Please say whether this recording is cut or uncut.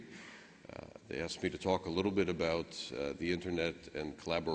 cut